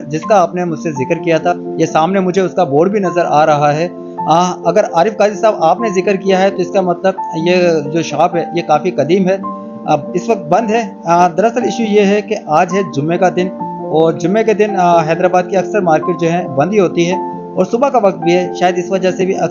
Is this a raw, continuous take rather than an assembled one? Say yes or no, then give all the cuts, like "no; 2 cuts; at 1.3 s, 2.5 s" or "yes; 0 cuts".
yes; 0 cuts